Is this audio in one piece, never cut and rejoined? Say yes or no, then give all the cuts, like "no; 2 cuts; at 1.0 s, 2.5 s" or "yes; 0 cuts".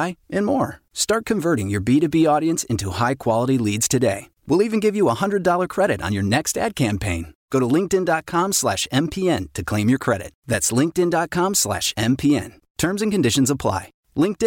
yes; 0 cuts